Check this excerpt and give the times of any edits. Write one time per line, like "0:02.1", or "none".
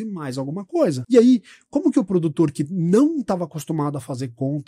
0:01.0